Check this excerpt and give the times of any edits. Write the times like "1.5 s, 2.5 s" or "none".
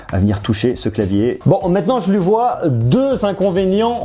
1.4 s